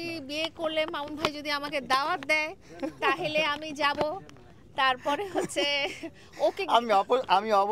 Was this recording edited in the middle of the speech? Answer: no; 0 cuts

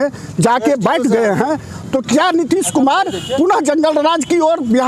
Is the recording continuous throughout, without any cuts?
no; 1 cut; at 1.8 s

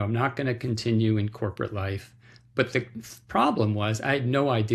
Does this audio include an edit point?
no; 0 cuts

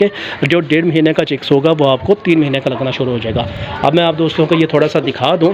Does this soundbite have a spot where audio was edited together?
no; 0 cuts

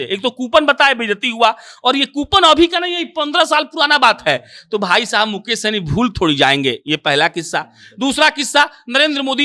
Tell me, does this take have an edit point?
no; 0 cuts

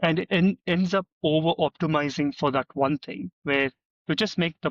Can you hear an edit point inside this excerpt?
no; 0 cuts

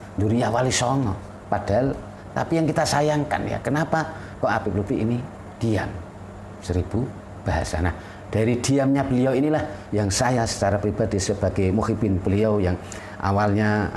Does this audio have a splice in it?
yes; 1 cut; at 2.1 s

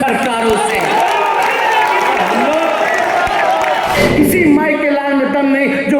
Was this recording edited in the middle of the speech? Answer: yes; 1 cut; at 4.0 s

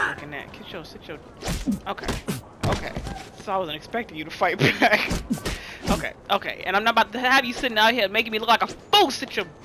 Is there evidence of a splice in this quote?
no; 0 cuts

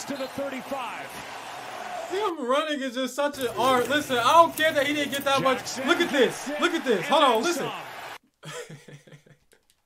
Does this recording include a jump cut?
yes; 1 cut; at 1.1 s

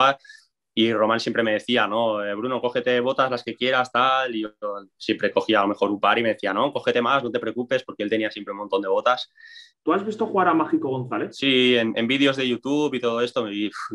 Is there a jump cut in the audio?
yes; 2 cuts; at 9.6 s, 11.4 s

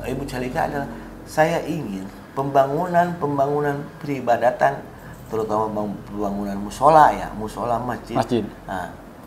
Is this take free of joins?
yes; 0 cuts

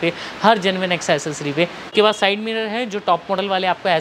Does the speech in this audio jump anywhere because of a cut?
yes; 1 cut; at 1.8 s

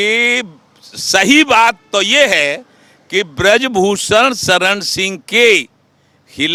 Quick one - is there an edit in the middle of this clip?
no; 0 cuts

